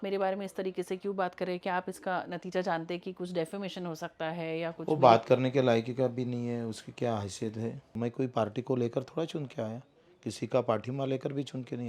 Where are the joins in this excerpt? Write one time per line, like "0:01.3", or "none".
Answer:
0:08.0